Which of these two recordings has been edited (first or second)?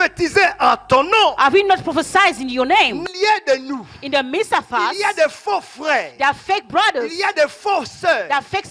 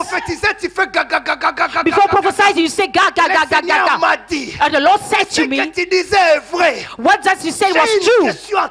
first